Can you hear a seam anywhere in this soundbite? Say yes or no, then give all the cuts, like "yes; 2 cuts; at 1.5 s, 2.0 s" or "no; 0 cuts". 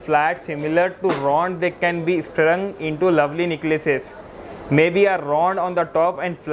no; 0 cuts